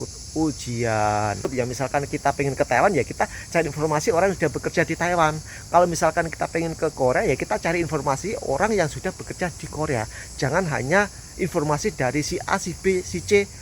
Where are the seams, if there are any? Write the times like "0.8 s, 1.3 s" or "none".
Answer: 1.5 s